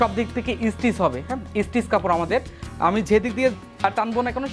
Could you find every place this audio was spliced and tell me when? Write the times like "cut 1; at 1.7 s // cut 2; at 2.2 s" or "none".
none